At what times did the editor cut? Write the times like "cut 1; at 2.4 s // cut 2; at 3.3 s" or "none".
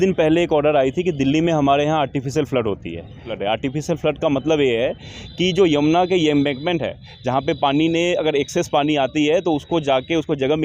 cut 1; at 3.3 s